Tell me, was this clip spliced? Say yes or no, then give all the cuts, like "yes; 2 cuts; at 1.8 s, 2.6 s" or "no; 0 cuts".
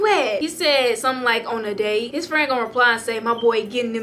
no; 0 cuts